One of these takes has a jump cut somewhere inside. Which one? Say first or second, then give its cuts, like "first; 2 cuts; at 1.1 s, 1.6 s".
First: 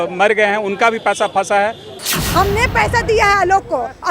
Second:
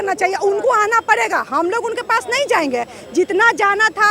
first; 1 cut; at 2.0 s